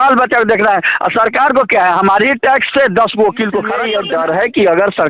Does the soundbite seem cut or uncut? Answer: cut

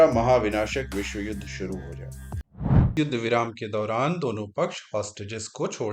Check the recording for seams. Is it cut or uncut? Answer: cut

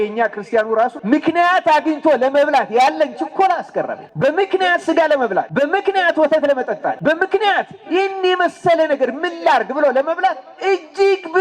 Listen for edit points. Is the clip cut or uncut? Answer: cut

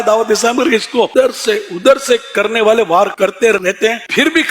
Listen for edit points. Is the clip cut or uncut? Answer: cut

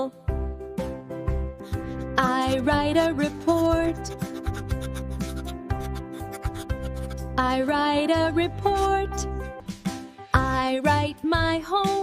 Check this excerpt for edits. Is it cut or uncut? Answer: cut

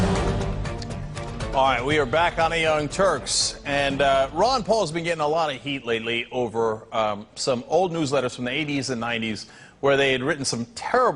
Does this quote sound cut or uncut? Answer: uncut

